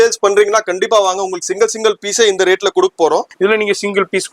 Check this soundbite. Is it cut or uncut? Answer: cut